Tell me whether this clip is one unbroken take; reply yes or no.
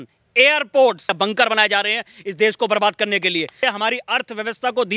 no